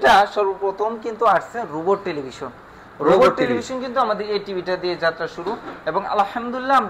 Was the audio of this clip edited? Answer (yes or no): no